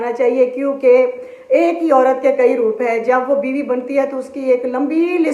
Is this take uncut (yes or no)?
yes